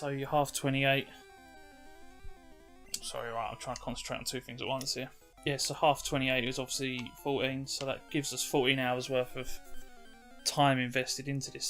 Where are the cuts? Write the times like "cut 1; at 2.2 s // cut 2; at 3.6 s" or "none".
cut 1; at 5.3 s